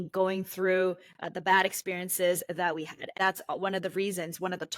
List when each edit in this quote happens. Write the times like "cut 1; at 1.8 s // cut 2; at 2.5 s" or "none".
cut 1; at 3.2 s